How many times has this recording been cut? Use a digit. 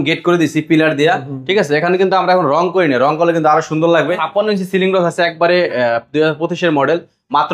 1